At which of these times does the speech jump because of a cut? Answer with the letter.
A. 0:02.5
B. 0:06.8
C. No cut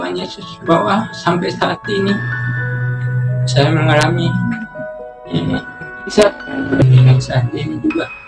B